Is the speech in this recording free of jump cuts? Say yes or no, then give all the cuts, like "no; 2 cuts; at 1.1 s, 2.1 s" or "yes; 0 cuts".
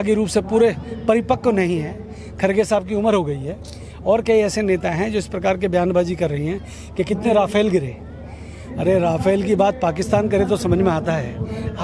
yes; 0 cuts